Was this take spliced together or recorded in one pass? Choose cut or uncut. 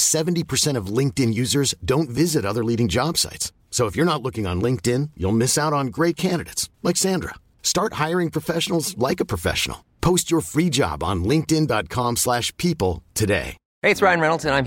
cut